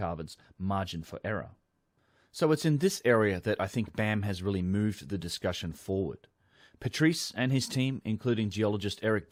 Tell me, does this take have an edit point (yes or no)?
no